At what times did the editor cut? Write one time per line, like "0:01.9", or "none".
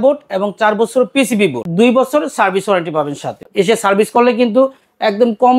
0:01.6
0:03.4